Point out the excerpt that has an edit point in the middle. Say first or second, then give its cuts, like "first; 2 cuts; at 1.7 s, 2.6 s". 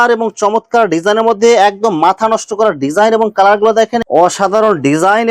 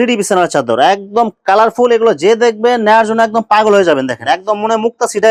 first; 1 cut; at 4.0 s